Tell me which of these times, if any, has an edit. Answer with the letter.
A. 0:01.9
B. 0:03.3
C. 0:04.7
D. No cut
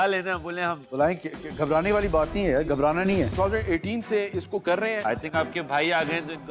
B